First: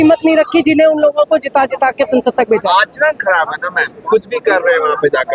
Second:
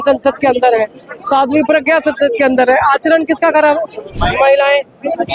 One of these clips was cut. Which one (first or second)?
second